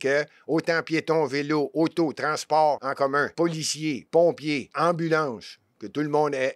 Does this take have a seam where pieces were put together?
yes; 2 cuts; at 3.0 s, 4.7 s

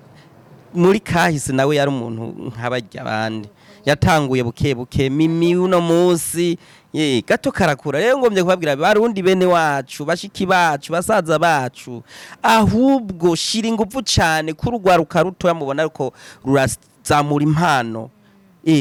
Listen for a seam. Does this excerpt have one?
no; 0 cuts

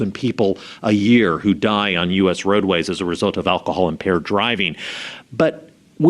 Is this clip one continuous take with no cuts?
yes; 0 cuts

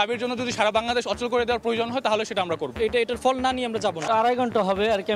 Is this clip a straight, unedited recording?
no; 2 cuts; at 2.7 s, 4.1 s

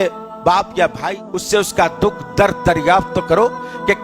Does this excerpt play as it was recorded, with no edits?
no; 1 cut; at 1.0 s

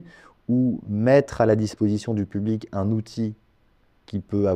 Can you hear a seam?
no; 0 cuts

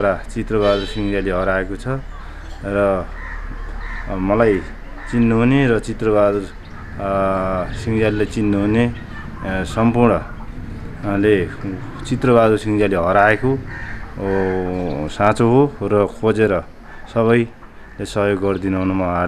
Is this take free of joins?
yes; 0 cuts

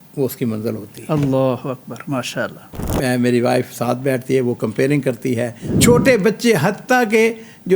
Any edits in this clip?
yes; 2 cuts; at 2.6 s, 5.6 s

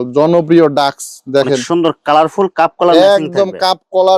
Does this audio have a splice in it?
no; 0 cuts

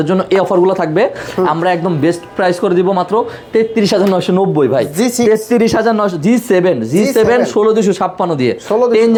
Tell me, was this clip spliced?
no; 0 cuts

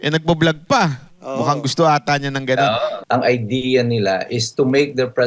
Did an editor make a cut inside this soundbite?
yes; 1 cut; at 3.0 s

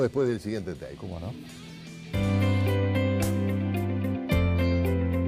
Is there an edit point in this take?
no; 0 cuts

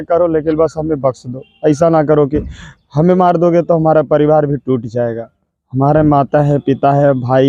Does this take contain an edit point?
no; 0 cuts

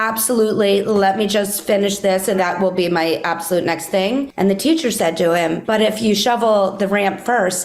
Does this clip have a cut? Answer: yes; 3 cuts; at 2.4 s, 4.3 s, 5.6 s

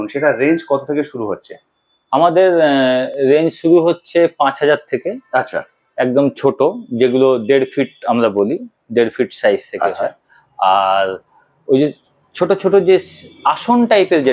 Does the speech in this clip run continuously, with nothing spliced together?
yes; 0 cuts

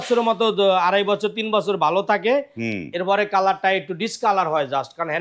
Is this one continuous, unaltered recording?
yes; 0 cuts

